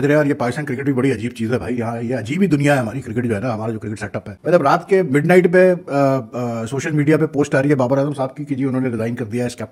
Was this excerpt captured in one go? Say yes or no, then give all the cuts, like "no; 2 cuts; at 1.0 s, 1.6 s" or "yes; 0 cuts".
yes; 0 cuts